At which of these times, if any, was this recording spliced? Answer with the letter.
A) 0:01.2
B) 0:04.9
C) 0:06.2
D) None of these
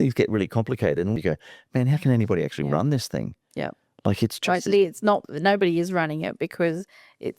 A